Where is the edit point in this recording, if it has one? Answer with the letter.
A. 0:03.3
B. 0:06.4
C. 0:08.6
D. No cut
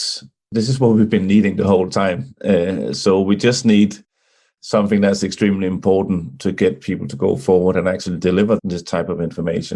C